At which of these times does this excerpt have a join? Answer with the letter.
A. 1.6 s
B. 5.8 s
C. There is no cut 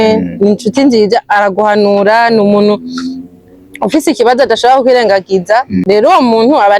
B